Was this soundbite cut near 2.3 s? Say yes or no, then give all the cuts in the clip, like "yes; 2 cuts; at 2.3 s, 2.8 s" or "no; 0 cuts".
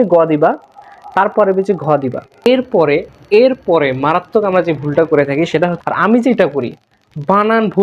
yes; 2 cuts; at 2.3 s, 5.8 s